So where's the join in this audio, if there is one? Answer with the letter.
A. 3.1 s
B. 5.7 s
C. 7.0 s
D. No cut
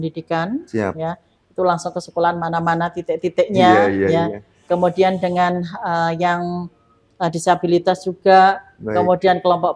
D